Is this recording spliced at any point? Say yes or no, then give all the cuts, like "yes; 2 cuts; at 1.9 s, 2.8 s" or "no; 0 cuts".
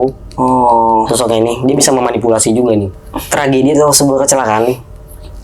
yes; 1 cut; at 3.0 s